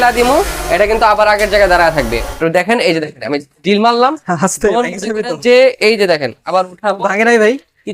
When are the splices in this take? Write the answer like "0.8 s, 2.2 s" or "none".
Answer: 2.4 s

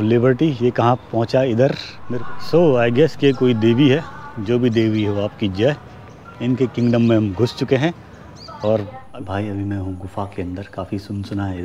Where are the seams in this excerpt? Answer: 2.0 s, 9.0 s

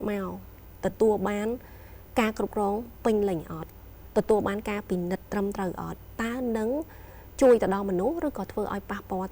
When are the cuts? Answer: none

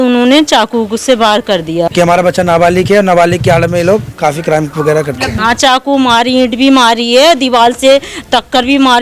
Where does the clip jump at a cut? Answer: 1.9 s, 5.3 s

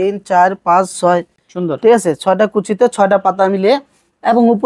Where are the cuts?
none

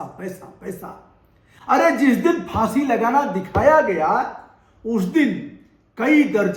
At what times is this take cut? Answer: none

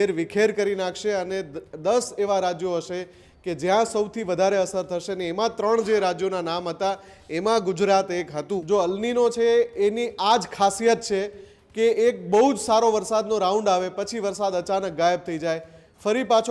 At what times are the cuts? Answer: 8.6 s

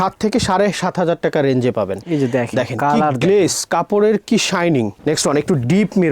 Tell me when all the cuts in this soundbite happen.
2.0 s, 4.9 s

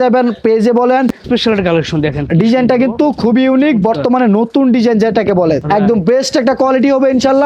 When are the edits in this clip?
1.2 s, 5.6 s

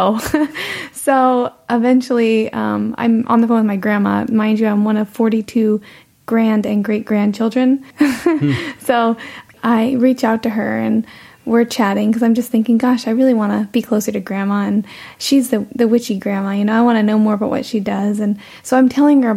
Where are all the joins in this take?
7.9 s, 9.5 s

